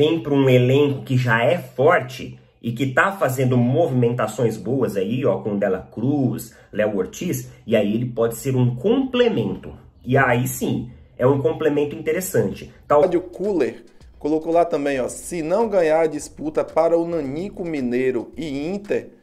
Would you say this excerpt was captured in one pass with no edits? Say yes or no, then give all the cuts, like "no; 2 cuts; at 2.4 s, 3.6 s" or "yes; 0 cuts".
no; 1 cut; at 13.0 s